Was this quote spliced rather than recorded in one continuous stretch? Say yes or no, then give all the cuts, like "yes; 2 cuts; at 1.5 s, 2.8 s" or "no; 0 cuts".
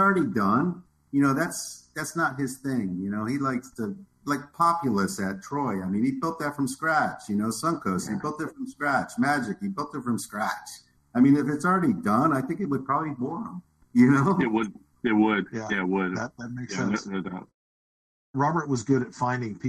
yes; 1 cut; at 18.1 s